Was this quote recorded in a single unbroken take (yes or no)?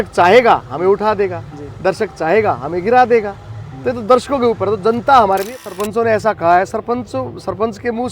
no